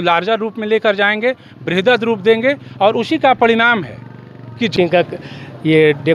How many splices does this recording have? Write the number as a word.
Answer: one